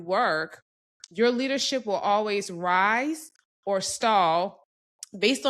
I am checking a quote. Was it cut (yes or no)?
no